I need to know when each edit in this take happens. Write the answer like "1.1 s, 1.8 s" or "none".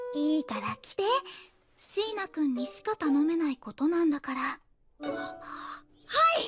5.0 s